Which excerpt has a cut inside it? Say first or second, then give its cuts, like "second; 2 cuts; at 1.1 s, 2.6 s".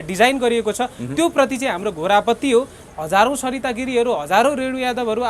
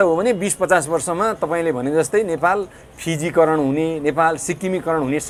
first; 1 cut; at 2.9 s